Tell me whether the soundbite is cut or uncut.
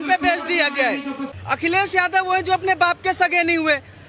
cut